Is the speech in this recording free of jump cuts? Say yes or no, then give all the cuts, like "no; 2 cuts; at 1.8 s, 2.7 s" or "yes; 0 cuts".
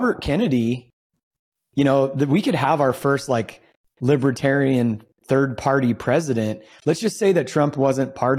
yes; 0 cuts